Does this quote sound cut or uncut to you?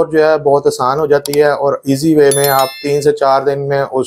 uncut